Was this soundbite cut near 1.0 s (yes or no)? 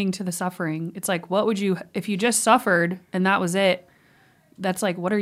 no